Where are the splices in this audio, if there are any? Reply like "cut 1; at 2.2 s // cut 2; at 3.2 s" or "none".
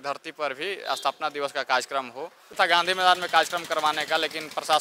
cut 1; at 2.5 s

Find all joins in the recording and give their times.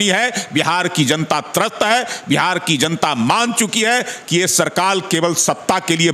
none

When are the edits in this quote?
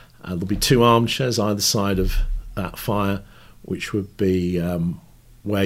none

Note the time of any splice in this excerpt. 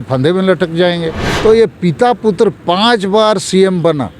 cut 1; at 1.2 s

